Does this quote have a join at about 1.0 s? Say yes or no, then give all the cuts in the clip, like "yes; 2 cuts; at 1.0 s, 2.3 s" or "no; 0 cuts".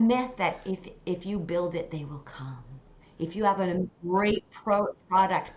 no; 0 cuts